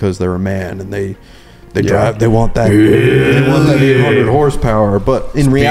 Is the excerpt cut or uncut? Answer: uncut